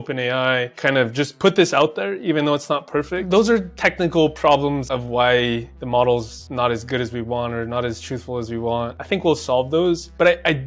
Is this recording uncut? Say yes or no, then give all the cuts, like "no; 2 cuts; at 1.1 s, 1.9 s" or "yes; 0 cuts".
no; 1 cut; at 3.2 s